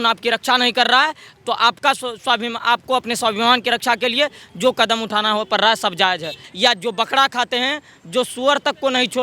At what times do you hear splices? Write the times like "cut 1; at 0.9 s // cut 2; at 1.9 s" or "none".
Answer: cut 1; at 6.4 s